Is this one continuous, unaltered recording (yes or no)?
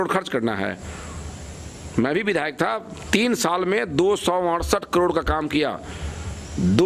yes